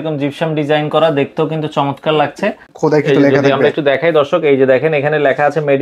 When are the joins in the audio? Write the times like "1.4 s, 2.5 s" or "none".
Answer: 2.7 s

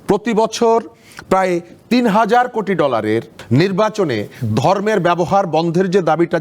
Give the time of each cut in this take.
3.3 s

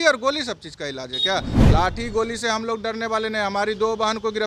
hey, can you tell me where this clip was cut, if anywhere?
none

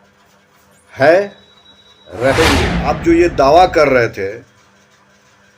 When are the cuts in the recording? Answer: 2.7 s

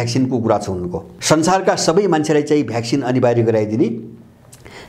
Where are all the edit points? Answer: 1.1 s

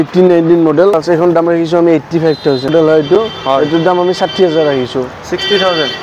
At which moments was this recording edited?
0.9 s, 2.7 s

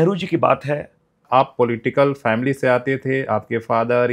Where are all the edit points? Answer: 1.2 s

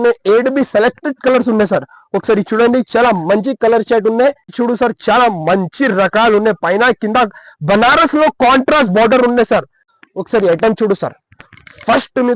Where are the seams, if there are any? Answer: 4.5 s, 9.8 s

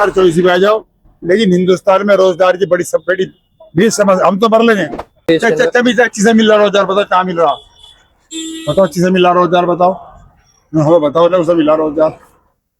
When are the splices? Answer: 5.3 s

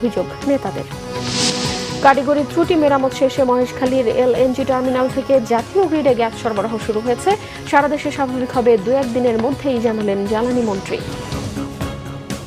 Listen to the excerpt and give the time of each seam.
11.3 s

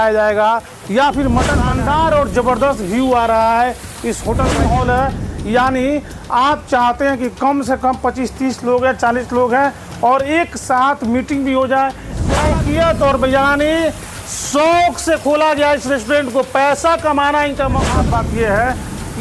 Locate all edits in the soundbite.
1.6 s, 4.5 s, 12.3 s, 17.9 s

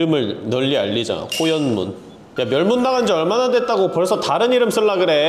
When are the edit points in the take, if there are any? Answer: 2.2 s

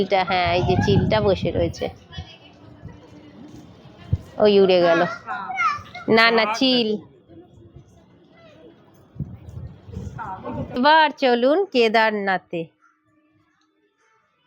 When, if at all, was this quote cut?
10.8 s

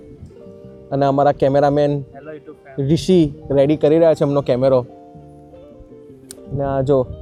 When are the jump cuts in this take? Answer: none

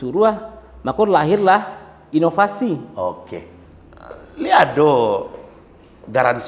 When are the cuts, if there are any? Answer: 3.5 s

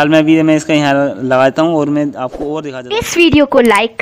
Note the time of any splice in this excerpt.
2.7 s

